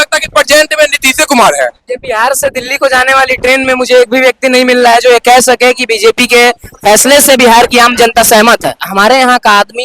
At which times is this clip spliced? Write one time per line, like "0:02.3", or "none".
0:01.9
0:08.8